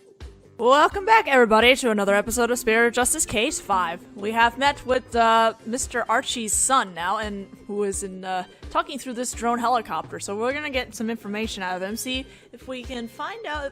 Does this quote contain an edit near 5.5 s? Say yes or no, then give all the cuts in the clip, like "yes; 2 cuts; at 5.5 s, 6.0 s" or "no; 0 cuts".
no; 0 cuts